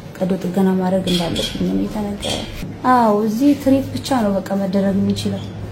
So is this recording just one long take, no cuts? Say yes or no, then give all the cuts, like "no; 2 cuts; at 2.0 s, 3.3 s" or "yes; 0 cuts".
no; 1 cut; at 2.7 s